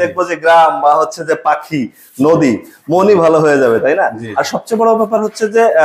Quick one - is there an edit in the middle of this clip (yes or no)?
no